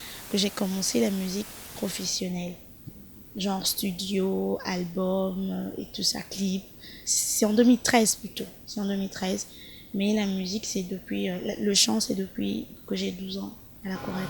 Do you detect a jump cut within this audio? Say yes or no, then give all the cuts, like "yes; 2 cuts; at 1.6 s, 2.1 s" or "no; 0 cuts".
no; 0 cuts